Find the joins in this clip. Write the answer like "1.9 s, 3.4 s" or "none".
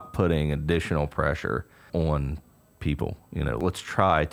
1.9 s, 3.6 s